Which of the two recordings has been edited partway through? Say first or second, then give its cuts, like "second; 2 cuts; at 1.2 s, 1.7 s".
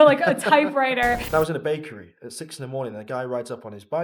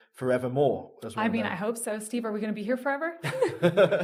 first; 1 cut; at 1.2 s